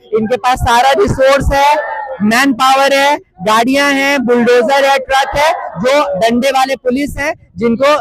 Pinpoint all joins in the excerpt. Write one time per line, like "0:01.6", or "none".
none